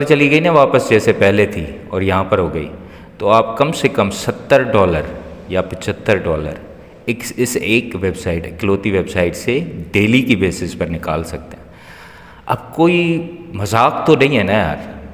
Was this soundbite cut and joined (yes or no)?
no